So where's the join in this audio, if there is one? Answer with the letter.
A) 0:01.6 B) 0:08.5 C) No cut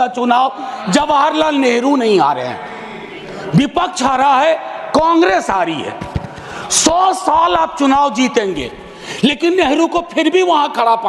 C